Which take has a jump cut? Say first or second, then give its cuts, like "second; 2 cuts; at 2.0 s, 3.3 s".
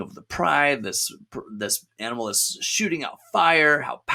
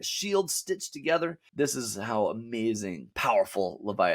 second; 2 cuts; at 1.4 s, 3.1 s